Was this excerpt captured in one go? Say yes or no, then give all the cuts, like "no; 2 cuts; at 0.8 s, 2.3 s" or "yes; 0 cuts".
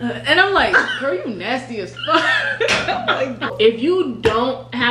no; 1 cut; at 3.5 s